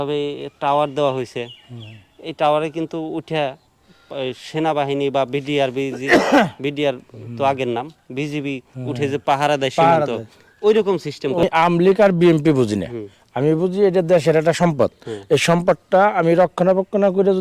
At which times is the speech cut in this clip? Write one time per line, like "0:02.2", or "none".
0:11.4